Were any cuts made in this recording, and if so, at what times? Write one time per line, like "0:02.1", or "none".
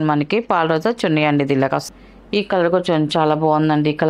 0:01.9